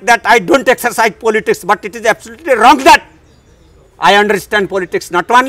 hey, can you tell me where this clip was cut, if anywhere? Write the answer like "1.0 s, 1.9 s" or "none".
none